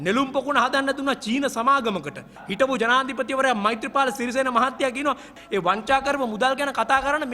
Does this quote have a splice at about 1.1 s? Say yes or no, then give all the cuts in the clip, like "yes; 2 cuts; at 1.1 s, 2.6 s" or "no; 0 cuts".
no; 2 cuts; at 2.4 s, 5.3 s